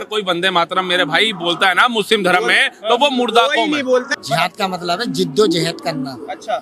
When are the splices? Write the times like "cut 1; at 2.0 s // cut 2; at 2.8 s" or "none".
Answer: cut 1; at 4.1 s